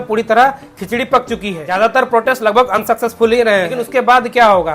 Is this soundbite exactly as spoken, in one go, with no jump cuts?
no; 2 cuts; at 1.6 s, 3.8 s

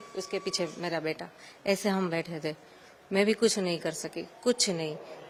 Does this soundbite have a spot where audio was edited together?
no; 0 cuts

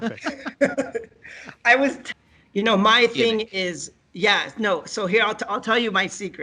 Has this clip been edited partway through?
yes; 1 cut; at 2.0 s

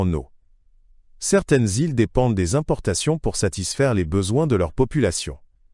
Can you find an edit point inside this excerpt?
yes; 1 cut; at 2.8 s

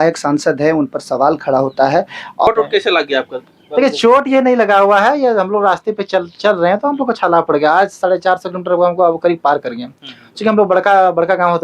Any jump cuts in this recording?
yes; 1 cut; at 2.5 s

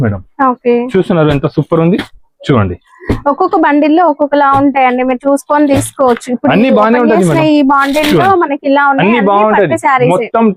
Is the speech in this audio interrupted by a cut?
no; 0 cuts

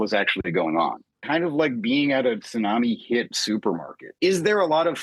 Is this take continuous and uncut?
no; 2 cuts; at 1.2 s, 4.0 s

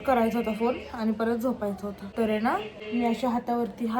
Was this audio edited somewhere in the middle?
yes; 2 cuts; at 2.0 s, 2.8 s

